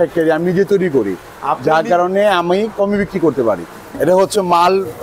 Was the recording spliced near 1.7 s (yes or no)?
no